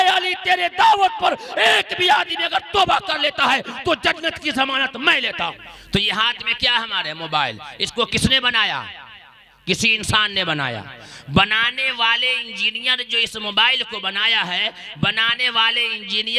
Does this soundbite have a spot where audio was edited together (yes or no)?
yes